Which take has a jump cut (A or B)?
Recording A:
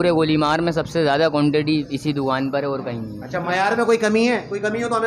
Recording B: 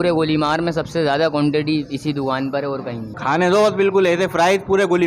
B